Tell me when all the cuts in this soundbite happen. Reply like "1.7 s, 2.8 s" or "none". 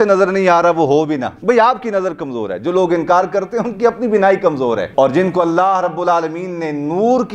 none